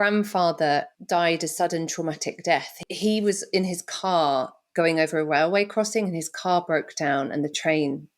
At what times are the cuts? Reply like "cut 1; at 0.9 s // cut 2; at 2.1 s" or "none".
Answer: cut 1; at 1.0 s // cut 2; at 2.8 s